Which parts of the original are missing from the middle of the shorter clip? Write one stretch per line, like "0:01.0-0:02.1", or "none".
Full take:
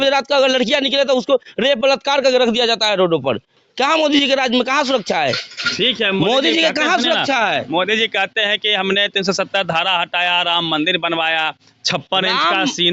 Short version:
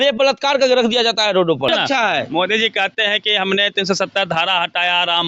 0:03.3-0:07.1